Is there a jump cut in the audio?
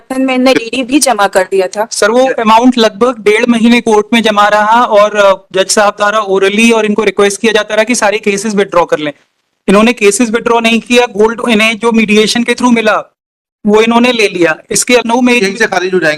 yes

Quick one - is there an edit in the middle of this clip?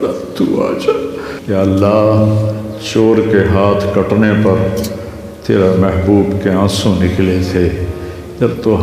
yes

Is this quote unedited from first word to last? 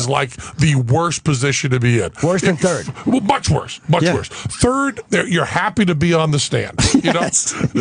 no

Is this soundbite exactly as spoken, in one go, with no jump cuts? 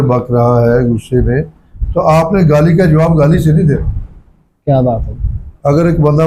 yes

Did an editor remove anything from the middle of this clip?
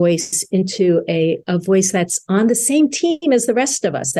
no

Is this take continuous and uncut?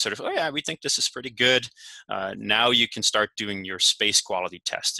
yes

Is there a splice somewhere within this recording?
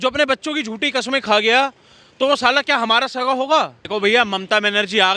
yes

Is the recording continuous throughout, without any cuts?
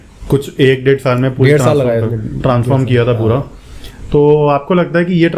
yes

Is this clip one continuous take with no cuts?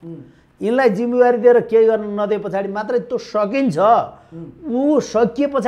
yes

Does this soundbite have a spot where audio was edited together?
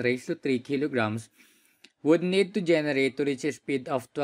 no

